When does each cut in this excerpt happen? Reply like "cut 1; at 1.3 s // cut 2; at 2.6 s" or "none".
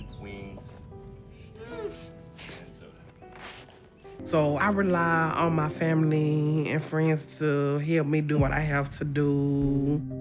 cut 1; at 4.2 s